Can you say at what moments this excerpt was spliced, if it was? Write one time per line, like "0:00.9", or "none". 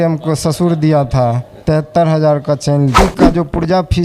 0:03.0